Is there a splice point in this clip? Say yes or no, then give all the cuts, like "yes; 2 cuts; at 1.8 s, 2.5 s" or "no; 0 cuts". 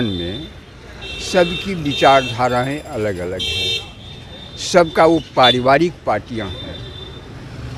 no; 0 cuts